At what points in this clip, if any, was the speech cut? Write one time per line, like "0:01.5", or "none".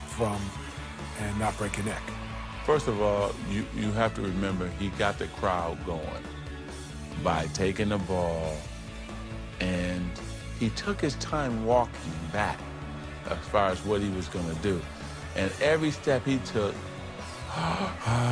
0:05.4